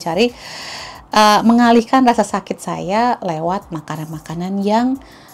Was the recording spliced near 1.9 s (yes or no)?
no